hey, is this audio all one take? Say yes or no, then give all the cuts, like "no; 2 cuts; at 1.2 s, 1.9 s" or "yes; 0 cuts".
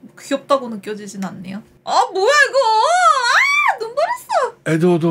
no; 1 cut; at 1.7 s